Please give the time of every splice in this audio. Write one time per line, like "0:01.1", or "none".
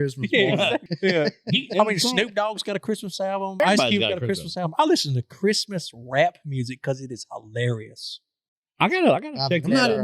0:00.9
0:03.6

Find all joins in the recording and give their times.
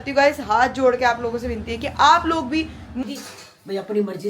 0:03.0

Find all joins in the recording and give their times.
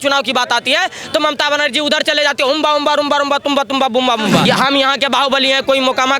0:04.5

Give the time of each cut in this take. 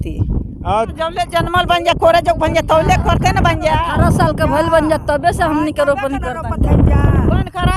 0:00.9

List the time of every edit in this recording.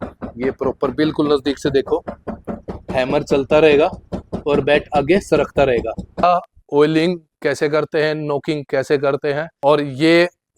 0:06.2
0:09.5

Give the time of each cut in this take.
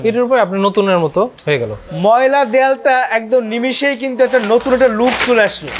0:01.8

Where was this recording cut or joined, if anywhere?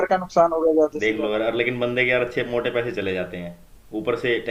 none

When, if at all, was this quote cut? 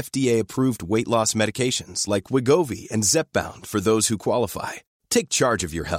none

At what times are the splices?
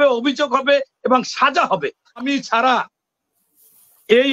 0:02.2

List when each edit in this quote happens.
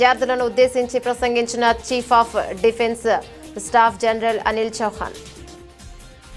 0:05.1

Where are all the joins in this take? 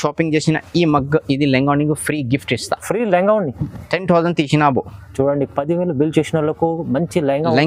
none

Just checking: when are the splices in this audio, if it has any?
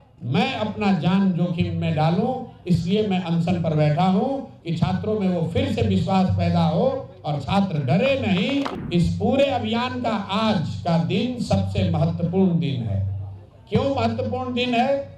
0:08.8

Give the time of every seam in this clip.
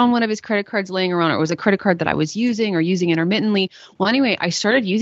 none

